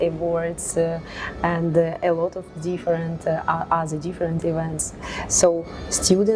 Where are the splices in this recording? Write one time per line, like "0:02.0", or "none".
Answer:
none